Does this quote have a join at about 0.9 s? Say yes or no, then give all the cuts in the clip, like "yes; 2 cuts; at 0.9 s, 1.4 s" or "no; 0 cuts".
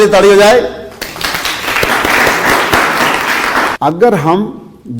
no; 1 cut; at 3.7 s